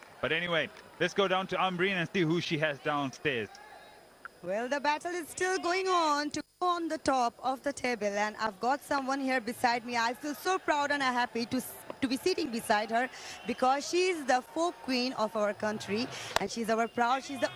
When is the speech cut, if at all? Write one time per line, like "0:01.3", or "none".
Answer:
none